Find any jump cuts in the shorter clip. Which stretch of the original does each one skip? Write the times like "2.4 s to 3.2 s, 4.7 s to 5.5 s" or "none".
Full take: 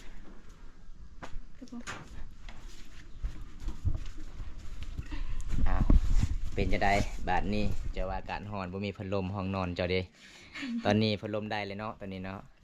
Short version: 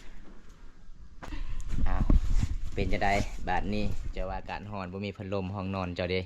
1.3 s to 5.1 s